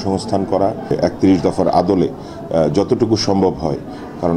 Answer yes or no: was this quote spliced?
yes